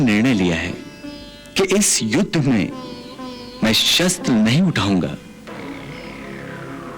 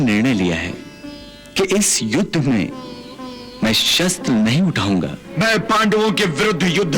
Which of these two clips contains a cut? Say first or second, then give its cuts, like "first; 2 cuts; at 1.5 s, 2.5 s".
second; 1 cut; at 5.2 s